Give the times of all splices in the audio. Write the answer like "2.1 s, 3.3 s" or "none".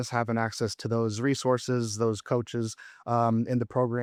none